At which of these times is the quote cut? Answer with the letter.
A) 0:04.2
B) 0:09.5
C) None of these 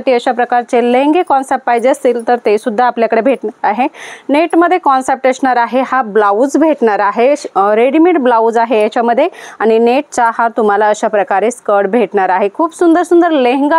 C